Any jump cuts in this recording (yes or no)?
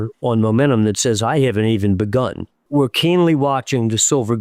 yes